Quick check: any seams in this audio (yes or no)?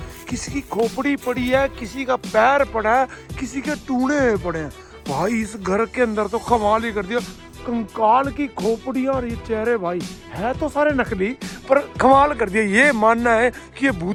no